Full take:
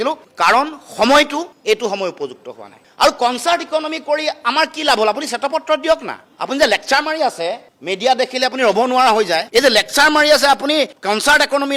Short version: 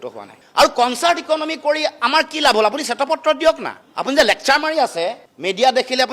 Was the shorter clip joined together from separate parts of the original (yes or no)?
no